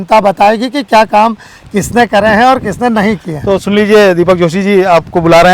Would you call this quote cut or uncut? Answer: uncut